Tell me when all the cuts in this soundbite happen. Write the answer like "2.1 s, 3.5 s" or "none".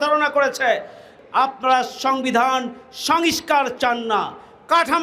1.1 s